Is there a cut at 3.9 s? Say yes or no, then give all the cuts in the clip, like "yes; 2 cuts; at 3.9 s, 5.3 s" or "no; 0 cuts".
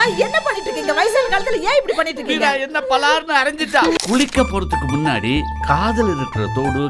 yes; 1 cut; at 3.9 s